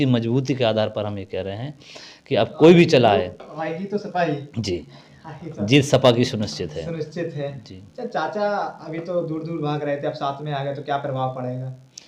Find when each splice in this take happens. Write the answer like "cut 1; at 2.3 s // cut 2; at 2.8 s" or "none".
none